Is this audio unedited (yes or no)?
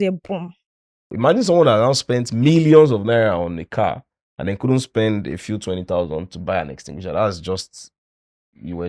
no